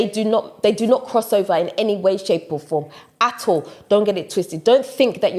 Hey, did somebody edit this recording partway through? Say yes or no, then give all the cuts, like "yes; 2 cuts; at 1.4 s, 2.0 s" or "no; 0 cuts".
no; 0 cuts